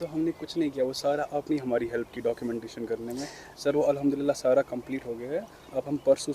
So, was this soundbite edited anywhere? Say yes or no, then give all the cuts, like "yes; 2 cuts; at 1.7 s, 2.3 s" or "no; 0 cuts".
no; 0 cuts